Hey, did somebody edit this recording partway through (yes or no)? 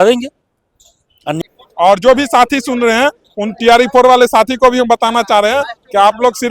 yes